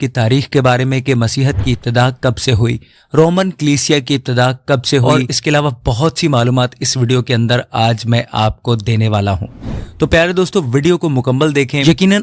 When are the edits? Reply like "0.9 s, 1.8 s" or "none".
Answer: none